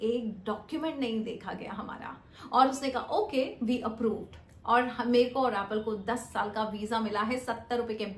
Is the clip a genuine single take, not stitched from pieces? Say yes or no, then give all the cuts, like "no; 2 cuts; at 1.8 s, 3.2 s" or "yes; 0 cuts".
yes; 0 cuts